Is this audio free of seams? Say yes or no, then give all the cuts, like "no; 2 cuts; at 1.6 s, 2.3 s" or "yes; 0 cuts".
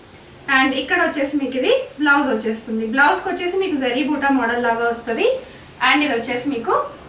yes; 0 cuts